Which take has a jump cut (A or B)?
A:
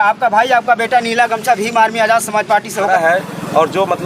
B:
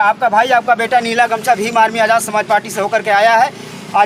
A